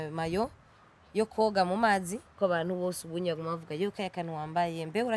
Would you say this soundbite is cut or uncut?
cut